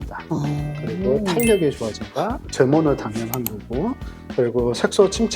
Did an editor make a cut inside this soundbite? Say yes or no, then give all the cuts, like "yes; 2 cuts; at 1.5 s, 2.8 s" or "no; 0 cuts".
yes; 1 cut; at 2.4 s